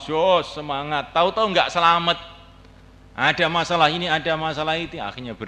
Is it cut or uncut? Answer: uncut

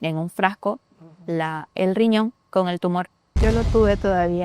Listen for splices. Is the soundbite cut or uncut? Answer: cut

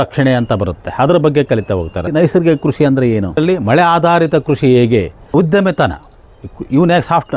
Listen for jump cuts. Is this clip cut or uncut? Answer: cut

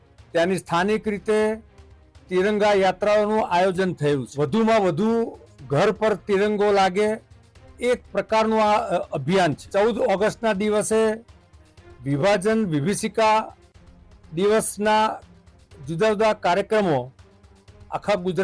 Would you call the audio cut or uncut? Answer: cut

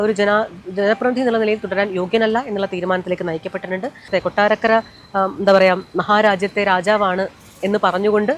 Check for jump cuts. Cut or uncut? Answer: cut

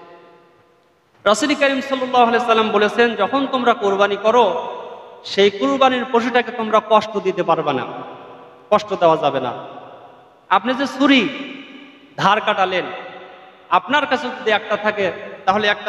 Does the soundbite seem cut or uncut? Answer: uncut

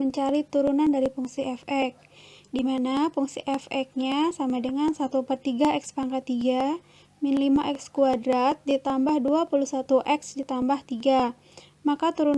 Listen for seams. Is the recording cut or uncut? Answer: uncut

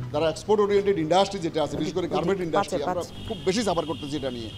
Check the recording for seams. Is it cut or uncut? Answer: uncut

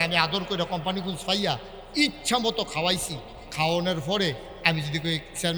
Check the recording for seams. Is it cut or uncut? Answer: uncut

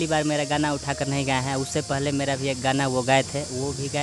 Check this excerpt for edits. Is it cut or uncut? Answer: uncut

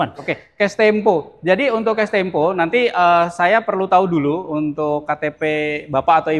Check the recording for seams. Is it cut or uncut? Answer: uncut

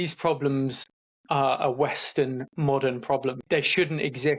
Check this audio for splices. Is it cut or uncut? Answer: cut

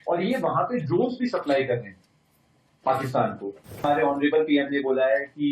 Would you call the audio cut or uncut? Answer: cut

